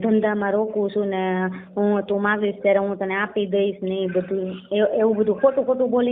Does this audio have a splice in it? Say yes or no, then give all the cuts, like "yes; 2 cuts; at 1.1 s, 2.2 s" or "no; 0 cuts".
no; 0 cuts